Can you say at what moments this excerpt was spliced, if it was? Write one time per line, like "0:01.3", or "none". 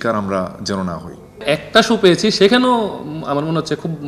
0:01.4